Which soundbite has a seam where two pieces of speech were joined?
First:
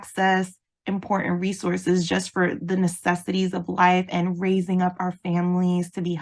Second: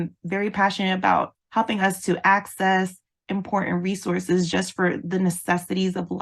second; 1 cut; at 1.3 s

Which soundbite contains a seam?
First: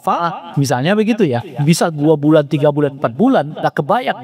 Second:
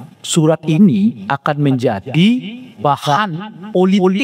second; 1 cut; at 2.8 s

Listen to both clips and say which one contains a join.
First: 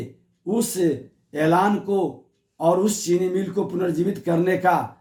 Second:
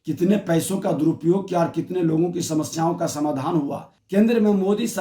second; 1 cut; at 3.9 s

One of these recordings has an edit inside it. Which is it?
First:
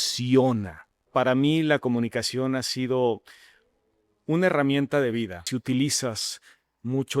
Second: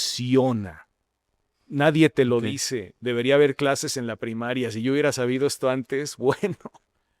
first; 2 cuts; at 1.0 s, 5.4 s

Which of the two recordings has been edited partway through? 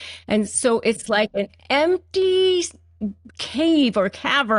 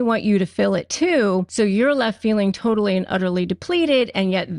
second; 1 cut; at 1.5 s

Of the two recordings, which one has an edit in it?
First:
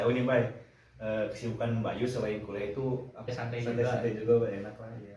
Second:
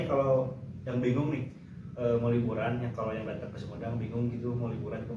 first; 1 cut; at 3.2 s

